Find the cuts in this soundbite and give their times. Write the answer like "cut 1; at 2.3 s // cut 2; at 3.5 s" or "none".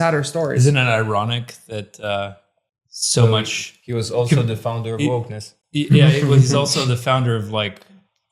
none